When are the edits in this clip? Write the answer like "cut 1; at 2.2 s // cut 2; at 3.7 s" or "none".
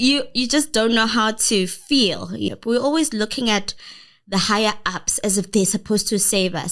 cut 1; at 2.5 s